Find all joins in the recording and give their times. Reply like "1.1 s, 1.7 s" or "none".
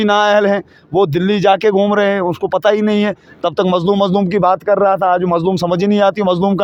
none